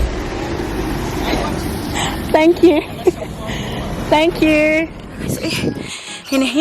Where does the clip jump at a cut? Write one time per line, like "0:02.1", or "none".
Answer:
0:05.3